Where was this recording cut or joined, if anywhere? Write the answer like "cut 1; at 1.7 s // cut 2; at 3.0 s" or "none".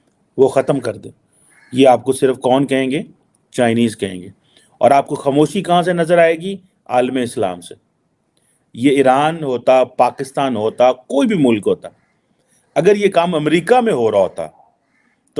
none